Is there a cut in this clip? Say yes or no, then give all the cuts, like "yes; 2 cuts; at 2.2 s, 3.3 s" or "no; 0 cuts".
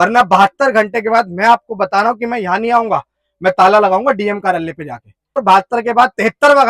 yes; 1 cut; at 5.4 s